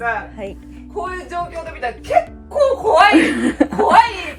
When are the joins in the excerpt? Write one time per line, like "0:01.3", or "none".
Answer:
none